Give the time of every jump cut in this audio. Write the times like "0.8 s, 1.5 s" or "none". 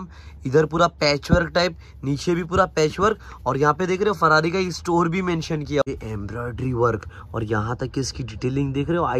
5.8 s